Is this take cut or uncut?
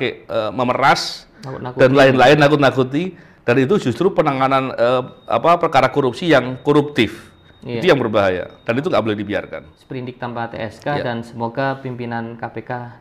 cut